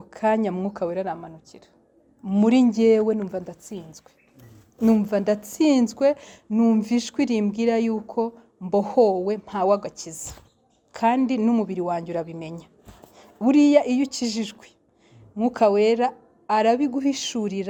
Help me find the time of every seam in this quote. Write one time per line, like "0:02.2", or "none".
none